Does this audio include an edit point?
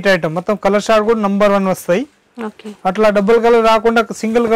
no; 0 cuts

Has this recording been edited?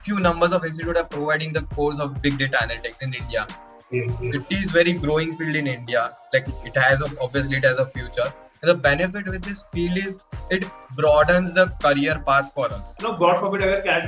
yes; 1 cut; at 13.0 s

